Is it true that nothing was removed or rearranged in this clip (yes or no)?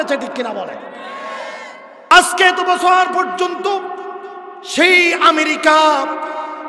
no